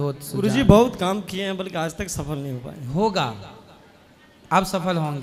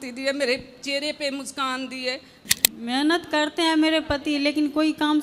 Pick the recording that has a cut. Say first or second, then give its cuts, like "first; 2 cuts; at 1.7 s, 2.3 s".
second; 1 cut; at 2.4 s